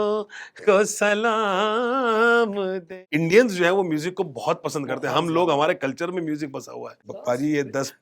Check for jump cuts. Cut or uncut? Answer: cut